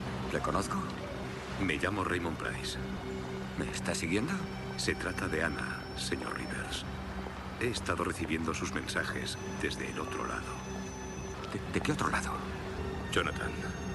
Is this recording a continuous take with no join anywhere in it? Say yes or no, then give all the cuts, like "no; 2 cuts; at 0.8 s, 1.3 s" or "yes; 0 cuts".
yes; 0 cuts